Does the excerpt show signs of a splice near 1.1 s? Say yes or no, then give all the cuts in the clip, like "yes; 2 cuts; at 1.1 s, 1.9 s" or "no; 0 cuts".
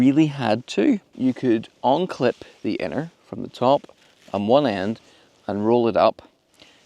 yes; 1 cut; at 1.1 s